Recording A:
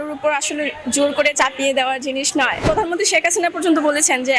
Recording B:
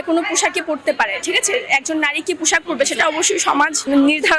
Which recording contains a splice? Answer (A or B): A